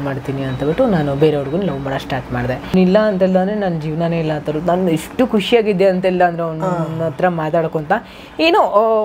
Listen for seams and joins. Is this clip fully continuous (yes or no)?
no